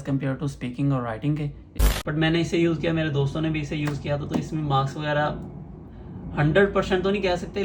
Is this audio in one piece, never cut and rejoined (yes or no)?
no